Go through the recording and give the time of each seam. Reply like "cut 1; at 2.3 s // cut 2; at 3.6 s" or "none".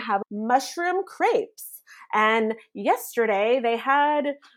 none